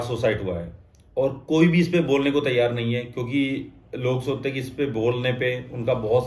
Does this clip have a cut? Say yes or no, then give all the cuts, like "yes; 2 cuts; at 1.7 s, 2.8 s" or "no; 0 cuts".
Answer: no; 0 cuts